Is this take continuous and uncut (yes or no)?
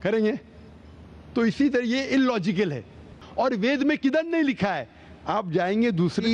no